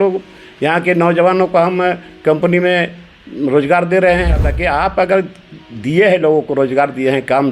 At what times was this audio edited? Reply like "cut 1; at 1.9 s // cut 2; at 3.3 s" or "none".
cut 1; at 4.5 s